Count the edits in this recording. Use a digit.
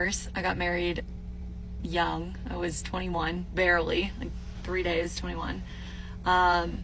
0